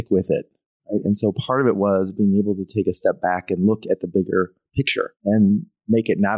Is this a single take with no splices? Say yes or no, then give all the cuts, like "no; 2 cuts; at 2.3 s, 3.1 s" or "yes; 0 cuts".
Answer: no; 1 cut; at 5.1 s